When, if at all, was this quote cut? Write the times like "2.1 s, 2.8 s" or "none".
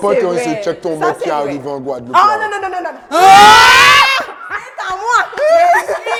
none